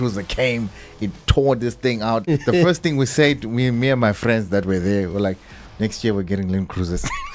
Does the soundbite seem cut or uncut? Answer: cut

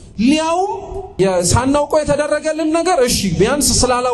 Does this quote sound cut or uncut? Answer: cut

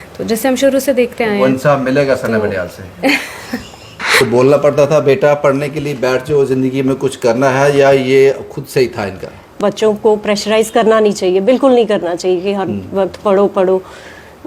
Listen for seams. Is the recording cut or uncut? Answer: cut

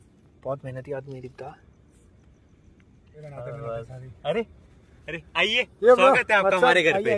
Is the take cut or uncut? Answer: cut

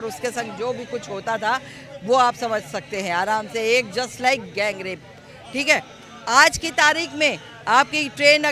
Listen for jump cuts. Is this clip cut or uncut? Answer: uncut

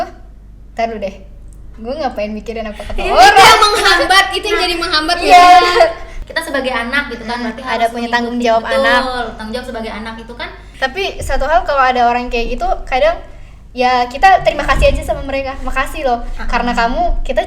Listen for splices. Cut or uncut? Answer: cut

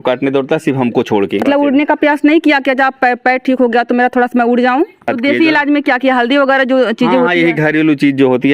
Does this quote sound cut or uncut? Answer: cut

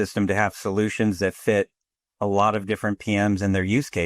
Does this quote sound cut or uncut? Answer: uncut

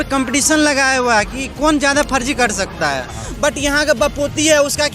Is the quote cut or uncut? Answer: cut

